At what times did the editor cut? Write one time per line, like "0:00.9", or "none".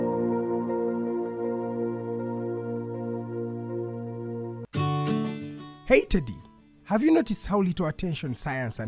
0:04.6